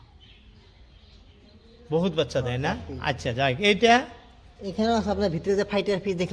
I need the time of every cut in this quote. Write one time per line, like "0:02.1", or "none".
none